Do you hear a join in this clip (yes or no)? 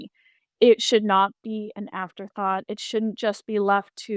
no